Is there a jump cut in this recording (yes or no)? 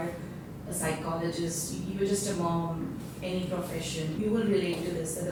no